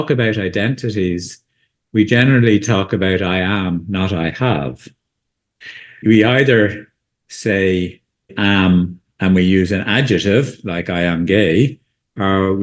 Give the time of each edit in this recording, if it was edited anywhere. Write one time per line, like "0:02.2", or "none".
0:06.0
0:07.2
0:08.3